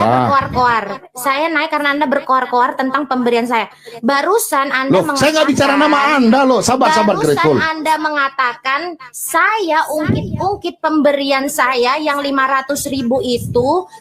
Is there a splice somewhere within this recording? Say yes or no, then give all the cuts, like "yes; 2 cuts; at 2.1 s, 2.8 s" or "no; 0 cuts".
no; 0 cuts